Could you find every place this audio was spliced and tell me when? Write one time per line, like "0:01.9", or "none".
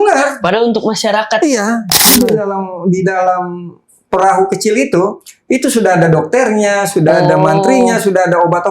0:02.1

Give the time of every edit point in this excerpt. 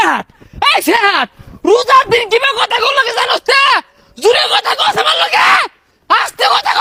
none

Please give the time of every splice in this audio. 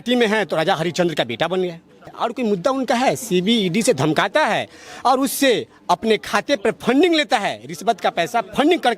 0:02.1

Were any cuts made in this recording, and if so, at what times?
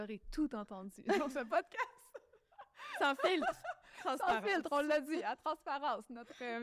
none

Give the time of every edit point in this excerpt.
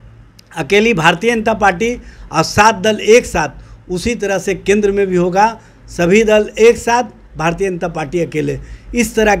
none

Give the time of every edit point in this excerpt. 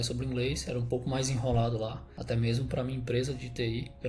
0:02.1

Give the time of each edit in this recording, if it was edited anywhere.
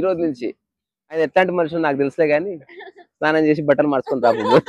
0:01.2

